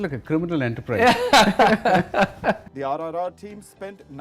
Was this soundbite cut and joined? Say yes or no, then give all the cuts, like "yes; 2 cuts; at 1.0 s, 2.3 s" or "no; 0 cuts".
yes; 1 cut; at 2.7 s